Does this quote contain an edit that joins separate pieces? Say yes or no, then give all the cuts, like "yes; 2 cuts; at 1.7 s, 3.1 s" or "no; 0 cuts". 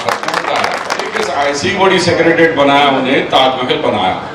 yes; 1 cut; at 1.2 s